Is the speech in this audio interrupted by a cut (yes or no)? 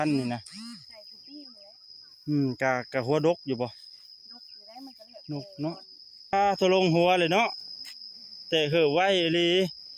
yes